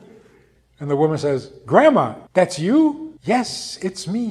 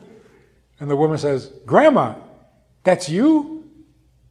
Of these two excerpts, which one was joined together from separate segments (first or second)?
first